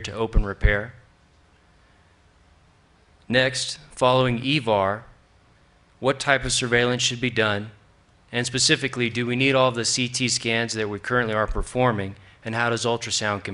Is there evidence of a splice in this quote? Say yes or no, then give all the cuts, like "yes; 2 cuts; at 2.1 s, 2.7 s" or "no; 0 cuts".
no; 0 cuts